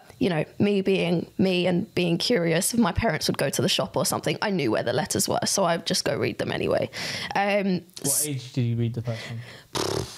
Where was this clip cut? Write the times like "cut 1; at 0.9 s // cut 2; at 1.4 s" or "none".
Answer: none

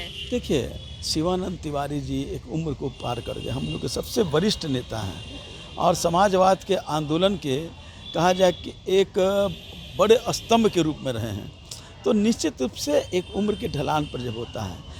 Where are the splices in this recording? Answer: none

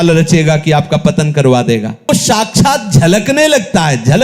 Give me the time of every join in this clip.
cut 1; at 2.1 s

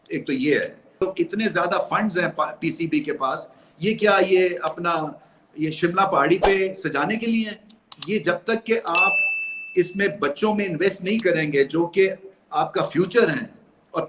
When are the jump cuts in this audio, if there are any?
cut 1; at 1.0 s

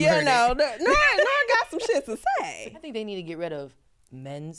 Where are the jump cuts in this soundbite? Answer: cut 1; at 2.9 s

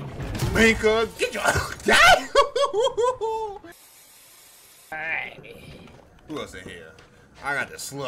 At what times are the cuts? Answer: cut 1; at 4.9 s

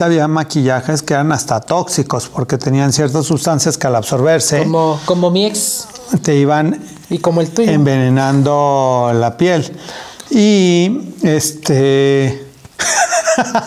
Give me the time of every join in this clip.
none

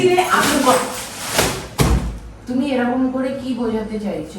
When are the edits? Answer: none

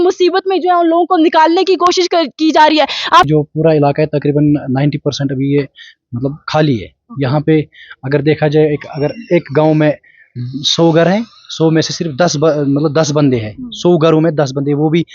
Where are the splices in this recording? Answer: cut 1; at 3.3 s

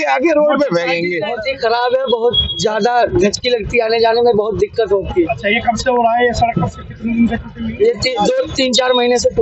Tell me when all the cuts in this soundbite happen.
cut 1; at 1.4 s

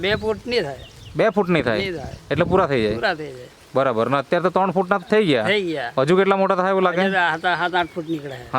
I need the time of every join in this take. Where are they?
none

